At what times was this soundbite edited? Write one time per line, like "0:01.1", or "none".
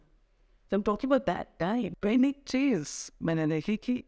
0:01.9